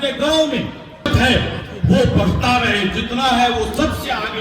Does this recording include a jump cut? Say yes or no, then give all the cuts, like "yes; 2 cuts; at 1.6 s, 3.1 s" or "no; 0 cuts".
no; 0 cuts